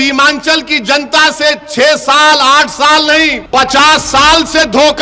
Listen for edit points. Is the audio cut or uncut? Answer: cut